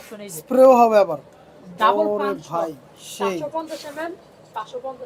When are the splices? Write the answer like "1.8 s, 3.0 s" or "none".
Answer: none